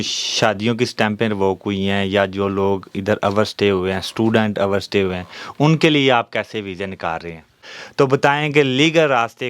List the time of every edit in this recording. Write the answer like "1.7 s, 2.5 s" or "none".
7.6 s